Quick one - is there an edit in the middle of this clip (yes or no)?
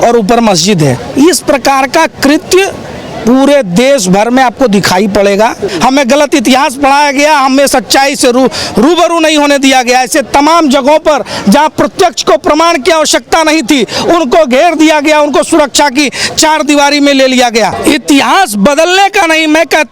yes